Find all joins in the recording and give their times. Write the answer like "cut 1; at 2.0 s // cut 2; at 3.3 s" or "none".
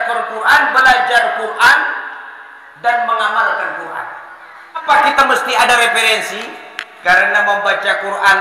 cut 1; at 4.8 s